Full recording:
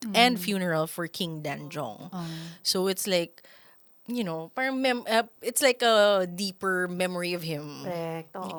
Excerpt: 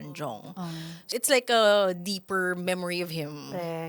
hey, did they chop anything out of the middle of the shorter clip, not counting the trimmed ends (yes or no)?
yes